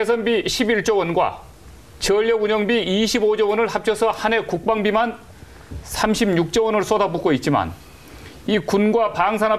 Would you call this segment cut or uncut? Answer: uncut